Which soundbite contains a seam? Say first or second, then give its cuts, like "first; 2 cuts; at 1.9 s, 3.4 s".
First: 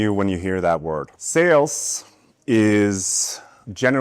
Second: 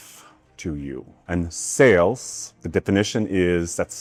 first; 1 cut; at 1.1 s